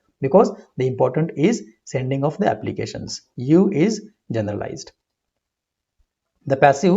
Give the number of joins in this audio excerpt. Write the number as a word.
zero